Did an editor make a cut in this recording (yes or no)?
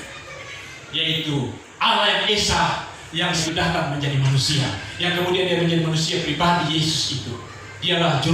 yes